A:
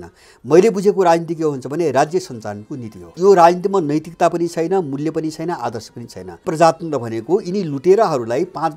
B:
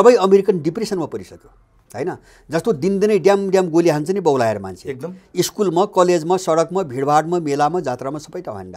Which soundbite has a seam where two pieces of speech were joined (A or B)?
A